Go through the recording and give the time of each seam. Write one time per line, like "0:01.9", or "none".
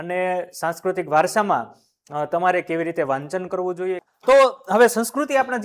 0:04.0

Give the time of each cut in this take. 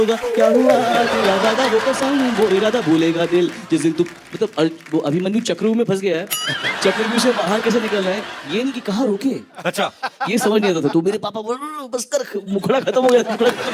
none

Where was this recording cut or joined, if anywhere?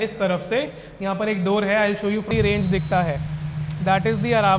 0:02.3

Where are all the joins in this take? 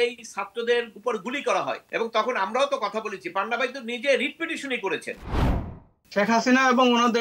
0:01.8
0:05.4

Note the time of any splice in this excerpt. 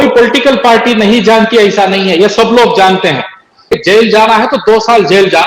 0:03.8

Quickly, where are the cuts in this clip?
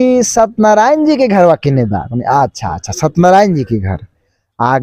none

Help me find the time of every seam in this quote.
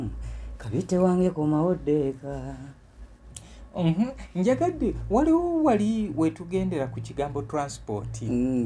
none

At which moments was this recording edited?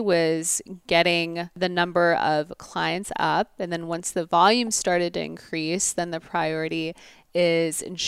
0:01.6

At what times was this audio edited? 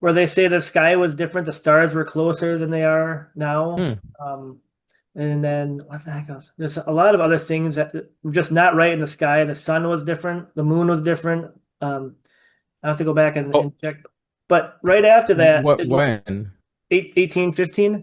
none

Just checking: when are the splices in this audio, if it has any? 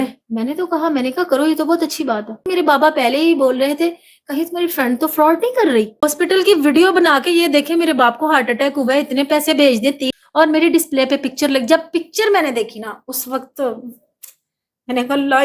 0:02.4
0:06.0
0:10.1

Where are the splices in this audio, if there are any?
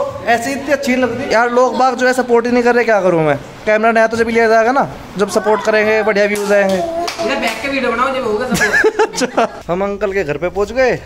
0:01.2
0:09.6

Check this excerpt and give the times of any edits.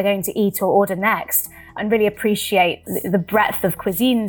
0:01.7
0:02.9

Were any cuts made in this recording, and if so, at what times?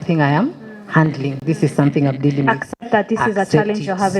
none

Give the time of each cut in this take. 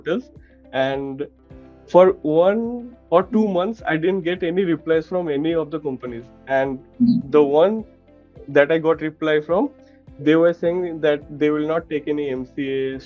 none

